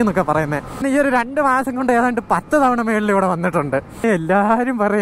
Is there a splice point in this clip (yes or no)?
yes